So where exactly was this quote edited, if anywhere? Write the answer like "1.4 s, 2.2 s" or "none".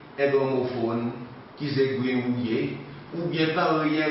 none